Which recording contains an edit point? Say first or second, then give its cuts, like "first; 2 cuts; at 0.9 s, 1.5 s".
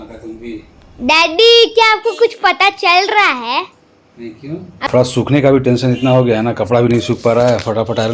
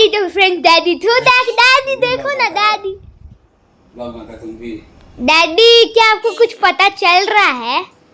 first; 1 cut; at 4.9 s